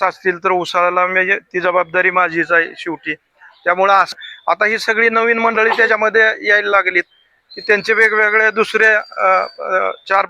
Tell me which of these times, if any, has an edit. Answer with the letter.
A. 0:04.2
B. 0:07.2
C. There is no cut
A